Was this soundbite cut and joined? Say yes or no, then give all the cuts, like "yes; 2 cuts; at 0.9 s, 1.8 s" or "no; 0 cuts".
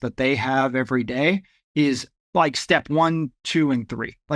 yes; 1 cut; at 2.1 s